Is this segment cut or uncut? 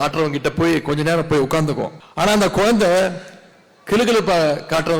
cut